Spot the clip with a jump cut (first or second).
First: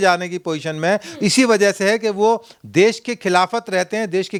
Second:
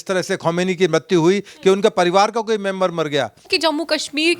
second